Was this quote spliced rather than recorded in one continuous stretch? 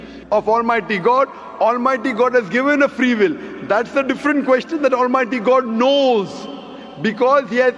no; 0 cuts

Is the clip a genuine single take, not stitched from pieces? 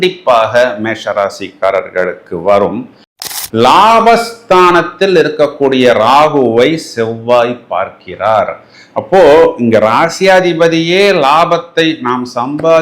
no; 1 cut; at 3.2 s

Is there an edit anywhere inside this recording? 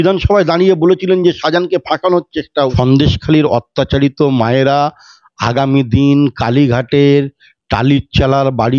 yes; 1 cut; at 2.7 s

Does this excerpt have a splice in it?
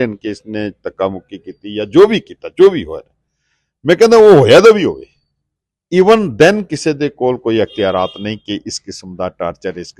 no; 0 cuts

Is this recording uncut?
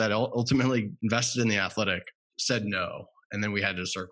no; 1 cut; at 0.9 s

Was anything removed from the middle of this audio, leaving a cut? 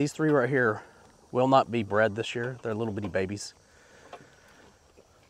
no; 0 cuts

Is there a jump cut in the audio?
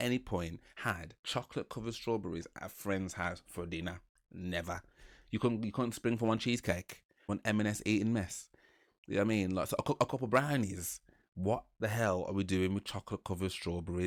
no; 0 cuts

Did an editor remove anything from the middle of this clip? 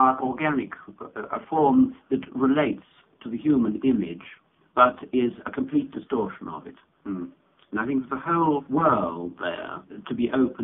yes; 1 cut; at 2.3 s

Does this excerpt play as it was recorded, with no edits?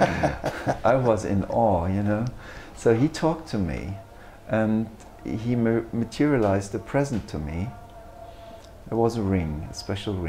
yes; 0 cuts

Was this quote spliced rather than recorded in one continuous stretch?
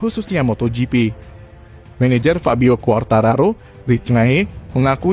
yes; 1 cut; at 1.8 s

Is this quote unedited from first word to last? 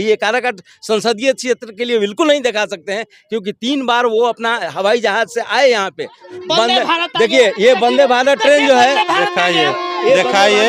yes; 0 cuts

